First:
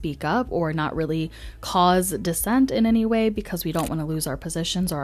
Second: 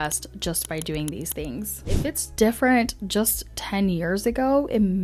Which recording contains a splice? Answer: second; 1 cut; at 2.0 s

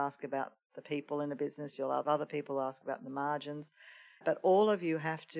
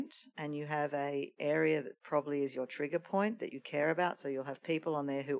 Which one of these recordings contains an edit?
first; 2 cuts; at 2.0 s, 4.2 s

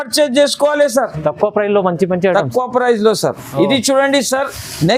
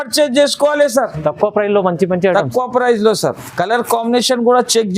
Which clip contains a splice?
second; 1 cut; at 3.4 s

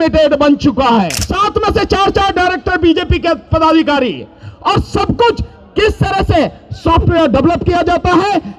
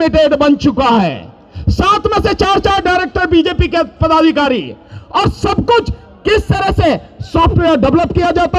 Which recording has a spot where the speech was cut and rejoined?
first; 1 cut; at 1.2 s

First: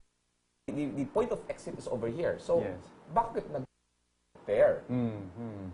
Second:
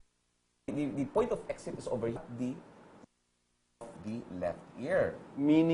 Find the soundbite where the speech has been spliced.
first; 1 cut; at 2.2 s

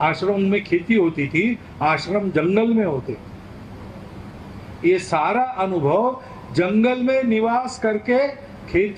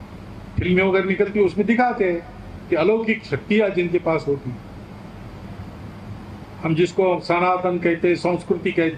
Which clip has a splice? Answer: second; 1 cut; at 5.4 s

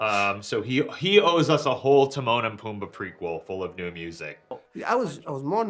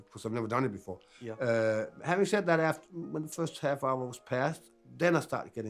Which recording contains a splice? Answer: first; 1 cut; at 4.5 s

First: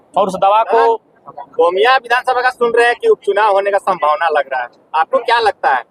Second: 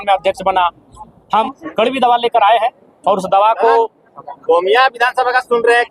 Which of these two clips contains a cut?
second; 1 cut; at 1.5 s

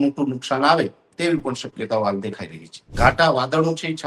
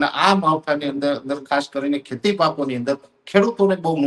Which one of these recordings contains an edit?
first; 1 cut; at 2.9 s

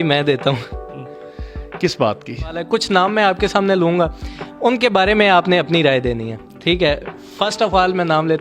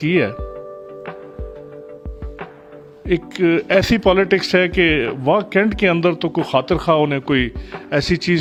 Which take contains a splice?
first; 1 cut; at 2.7 s

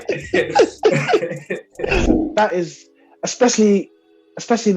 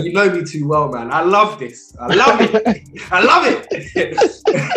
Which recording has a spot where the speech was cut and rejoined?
first; 1 cut; at 2.1 s

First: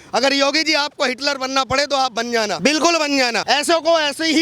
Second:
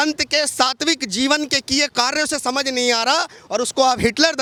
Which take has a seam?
first; 2 cuts; at 2.5 s, 3.4 s

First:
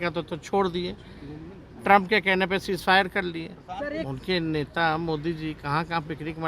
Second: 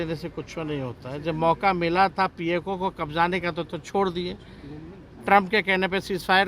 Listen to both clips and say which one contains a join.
first; 1 cut; at 4.0 s

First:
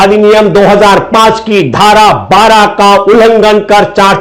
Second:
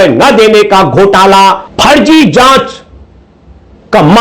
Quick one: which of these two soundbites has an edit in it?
second; 1 cut; at 1.7 s

